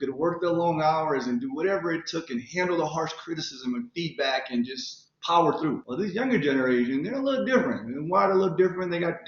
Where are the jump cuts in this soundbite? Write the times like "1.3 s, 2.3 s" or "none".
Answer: 5.9 s